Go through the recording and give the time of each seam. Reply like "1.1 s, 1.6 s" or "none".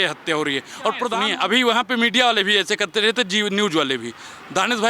1.2 s